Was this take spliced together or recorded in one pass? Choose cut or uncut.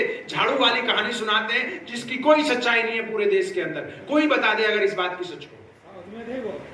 uncut